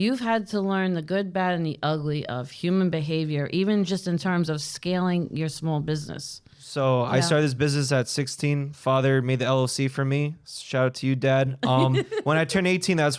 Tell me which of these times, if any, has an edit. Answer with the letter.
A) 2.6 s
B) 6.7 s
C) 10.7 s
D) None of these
B